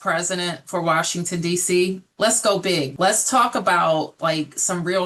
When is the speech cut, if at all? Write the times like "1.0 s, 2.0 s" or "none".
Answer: 2.9 s